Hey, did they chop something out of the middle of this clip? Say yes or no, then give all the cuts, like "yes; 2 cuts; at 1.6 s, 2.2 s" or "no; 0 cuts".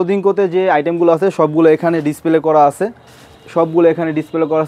no; 0 cuts